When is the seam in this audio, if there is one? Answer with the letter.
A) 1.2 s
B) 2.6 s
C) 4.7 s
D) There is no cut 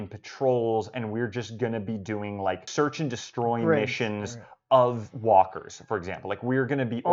B